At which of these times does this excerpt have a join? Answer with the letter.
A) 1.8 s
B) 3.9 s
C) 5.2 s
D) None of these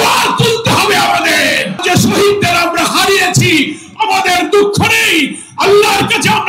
A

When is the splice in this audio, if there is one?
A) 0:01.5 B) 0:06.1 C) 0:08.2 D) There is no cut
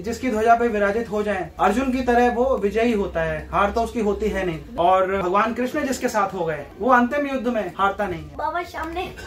C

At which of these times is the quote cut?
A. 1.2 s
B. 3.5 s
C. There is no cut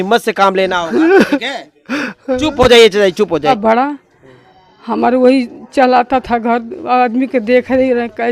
B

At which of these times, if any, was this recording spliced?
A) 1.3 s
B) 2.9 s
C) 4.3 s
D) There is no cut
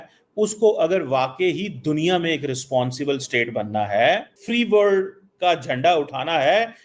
C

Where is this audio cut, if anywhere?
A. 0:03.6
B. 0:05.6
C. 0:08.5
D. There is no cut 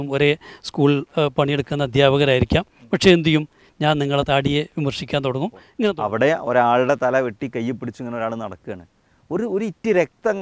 B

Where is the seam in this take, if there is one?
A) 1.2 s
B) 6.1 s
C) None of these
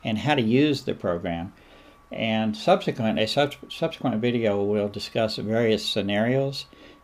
A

